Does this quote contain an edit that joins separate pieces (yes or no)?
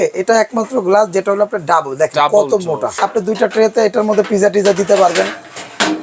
yes